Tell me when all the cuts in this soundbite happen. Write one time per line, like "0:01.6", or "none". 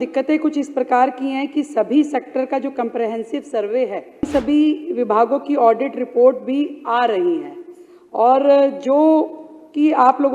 0:04.3